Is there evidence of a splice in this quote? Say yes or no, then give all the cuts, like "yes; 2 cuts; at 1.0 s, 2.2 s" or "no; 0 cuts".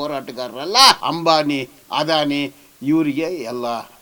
yes; 1 cut; at 1.0 s